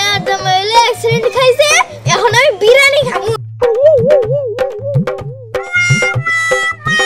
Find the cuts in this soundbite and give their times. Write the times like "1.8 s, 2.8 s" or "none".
none